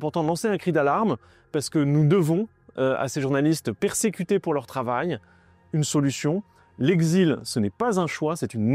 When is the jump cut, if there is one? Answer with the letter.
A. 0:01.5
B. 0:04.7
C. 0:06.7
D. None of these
D